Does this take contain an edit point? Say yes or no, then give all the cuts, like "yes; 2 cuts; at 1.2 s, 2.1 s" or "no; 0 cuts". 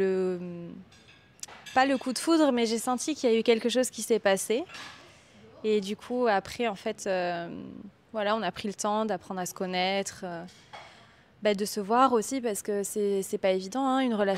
no; 0 cuts